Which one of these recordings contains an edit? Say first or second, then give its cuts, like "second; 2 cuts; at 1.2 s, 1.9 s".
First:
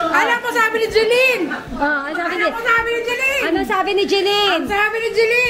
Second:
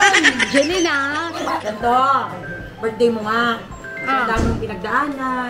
second; 1 cut; at 1.6 s